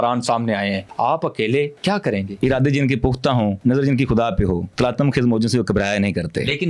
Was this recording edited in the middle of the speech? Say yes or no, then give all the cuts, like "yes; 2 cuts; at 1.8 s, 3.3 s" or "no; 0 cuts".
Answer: yes; 4 cuts; at 0.9 s, 2.1 s, 3.6 s, 4.7 s